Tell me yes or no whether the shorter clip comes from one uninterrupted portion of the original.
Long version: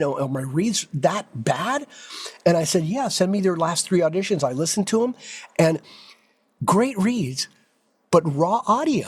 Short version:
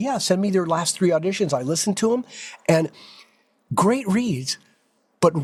yes